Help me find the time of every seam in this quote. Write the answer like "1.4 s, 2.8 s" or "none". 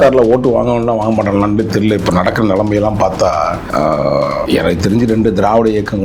3.6 s, 4.4 s